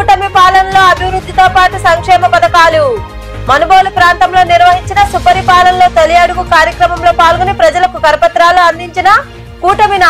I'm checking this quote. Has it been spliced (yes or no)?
no